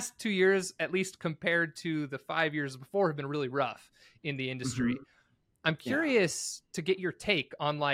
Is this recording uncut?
yes; 0 cuts

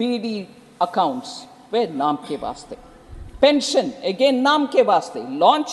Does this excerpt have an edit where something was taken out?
no; 0 cuts

